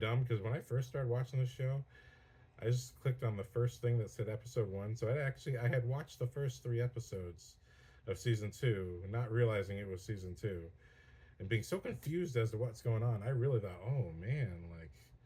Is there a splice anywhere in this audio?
no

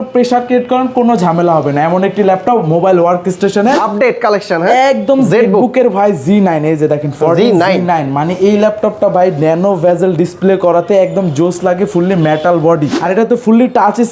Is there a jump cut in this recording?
yes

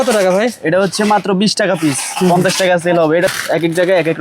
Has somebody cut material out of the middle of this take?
yes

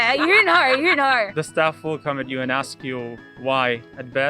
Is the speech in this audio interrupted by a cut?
yes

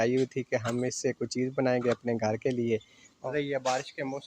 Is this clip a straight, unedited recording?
no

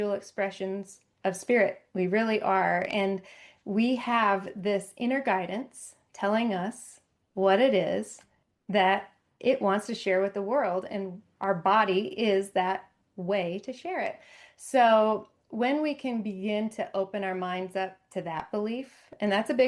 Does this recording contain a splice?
no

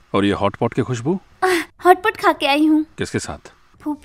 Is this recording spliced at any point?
yes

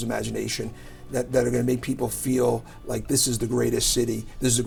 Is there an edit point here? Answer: no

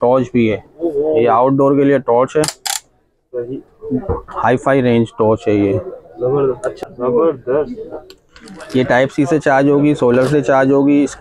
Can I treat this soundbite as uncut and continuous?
no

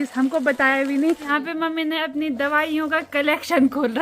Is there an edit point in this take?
yes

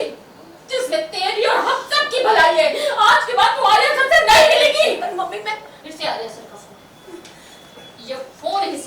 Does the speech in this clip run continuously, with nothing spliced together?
no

